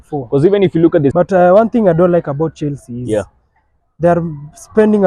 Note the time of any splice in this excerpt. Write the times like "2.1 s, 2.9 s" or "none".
1.1 s